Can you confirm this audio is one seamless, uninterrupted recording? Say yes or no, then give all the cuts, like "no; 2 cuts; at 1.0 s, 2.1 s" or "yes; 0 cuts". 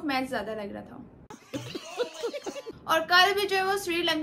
yes; 0 cuts